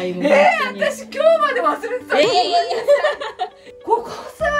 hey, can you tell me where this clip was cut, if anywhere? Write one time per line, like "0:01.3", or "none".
0:03.6